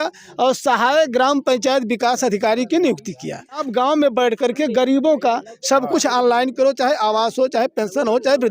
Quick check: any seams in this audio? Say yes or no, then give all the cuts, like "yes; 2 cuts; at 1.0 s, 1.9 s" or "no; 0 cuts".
yes; 1 cut; at 3.6 s